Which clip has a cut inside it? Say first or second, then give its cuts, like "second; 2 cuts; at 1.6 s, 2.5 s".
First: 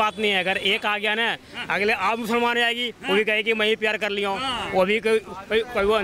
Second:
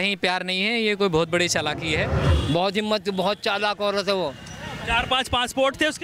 second; 1 cut; at 2.2 s